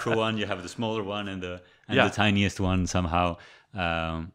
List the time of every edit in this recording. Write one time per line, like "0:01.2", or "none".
none